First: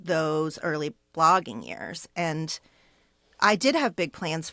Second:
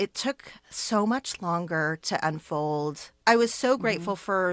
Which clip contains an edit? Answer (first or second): second